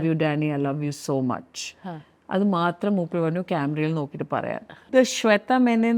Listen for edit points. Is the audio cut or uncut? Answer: cut